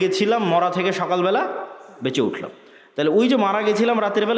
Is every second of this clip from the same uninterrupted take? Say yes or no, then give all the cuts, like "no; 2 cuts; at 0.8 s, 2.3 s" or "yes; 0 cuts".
yes; 0 cuts